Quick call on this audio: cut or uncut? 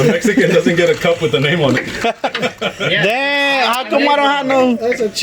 uncut